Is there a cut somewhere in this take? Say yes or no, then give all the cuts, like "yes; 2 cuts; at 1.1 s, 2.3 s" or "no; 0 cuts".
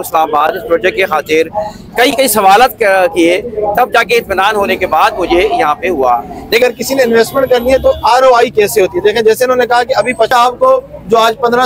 yes; 2 cuts; at 6.6 s, 10.3 s